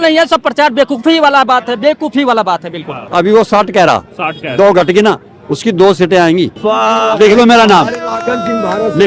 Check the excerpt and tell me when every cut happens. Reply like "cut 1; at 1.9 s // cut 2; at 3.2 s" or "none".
cut 1; at 2.9 s // cut 2; at 6.6 s